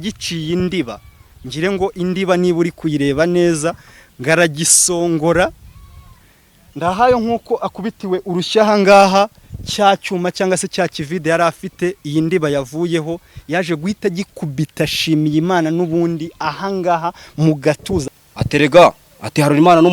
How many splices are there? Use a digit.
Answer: 1